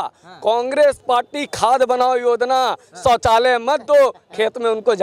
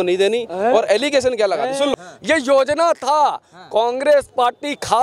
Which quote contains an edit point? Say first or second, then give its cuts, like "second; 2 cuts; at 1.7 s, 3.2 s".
second; 1 cut; at 1.9 s